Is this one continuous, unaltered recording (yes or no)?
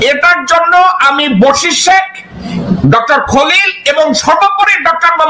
yes